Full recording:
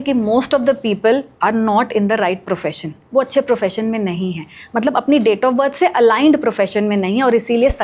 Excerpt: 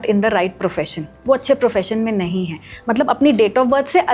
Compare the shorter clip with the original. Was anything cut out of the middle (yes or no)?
no